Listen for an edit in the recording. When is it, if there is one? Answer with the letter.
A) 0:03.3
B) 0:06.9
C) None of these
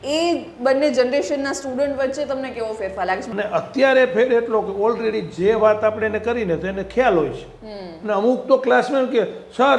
A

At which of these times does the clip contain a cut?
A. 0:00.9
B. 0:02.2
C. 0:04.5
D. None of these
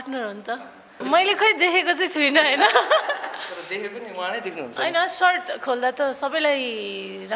A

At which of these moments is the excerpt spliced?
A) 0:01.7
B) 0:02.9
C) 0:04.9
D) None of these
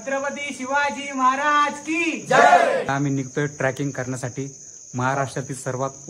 B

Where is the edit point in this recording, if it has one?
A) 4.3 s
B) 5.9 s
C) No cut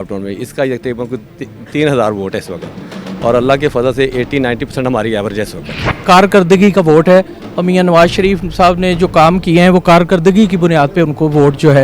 B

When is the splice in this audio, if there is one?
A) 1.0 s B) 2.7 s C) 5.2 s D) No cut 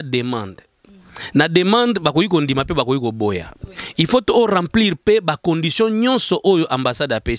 D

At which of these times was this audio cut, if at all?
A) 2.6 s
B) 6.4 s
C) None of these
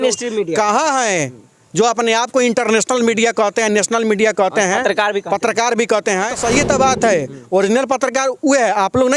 B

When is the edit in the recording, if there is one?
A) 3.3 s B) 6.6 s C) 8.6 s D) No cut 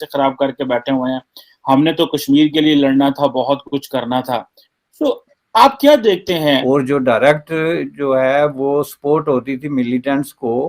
B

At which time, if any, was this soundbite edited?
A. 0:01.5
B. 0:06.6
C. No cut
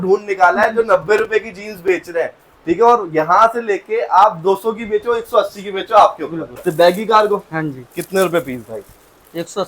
B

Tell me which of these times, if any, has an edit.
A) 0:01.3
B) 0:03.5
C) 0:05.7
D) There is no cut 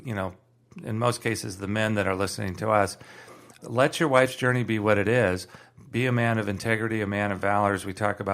B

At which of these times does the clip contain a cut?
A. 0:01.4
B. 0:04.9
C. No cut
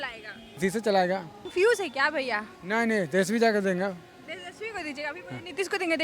A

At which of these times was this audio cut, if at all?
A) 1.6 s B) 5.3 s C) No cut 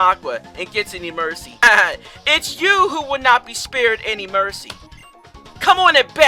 A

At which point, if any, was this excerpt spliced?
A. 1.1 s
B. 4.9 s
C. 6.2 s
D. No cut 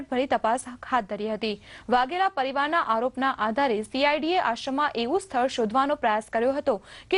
D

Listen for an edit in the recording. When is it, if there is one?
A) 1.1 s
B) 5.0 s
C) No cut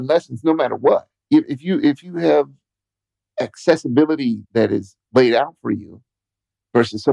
A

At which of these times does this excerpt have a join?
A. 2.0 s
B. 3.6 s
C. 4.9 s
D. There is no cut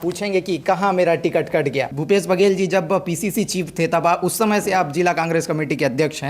A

